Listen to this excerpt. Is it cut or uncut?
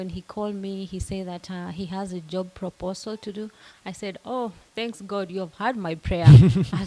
uncut